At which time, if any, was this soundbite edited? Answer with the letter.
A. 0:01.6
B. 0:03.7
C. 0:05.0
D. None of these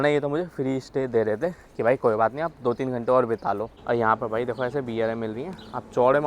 B